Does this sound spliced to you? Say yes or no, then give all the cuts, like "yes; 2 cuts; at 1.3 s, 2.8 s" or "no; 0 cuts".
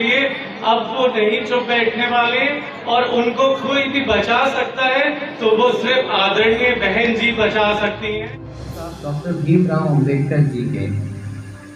yes; 1 cut; at 8.9 s